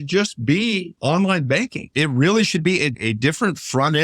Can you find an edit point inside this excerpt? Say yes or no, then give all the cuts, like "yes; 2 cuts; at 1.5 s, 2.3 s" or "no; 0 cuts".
yes; 3 cuts; at 0.9 s, 1.9 s, 3.0 s